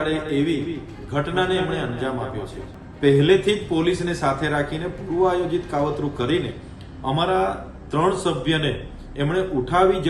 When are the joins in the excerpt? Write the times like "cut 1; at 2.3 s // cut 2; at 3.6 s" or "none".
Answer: cut 1; at 2.8 s